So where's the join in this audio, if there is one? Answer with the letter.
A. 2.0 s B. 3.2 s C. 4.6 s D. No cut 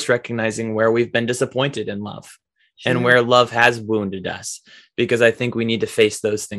D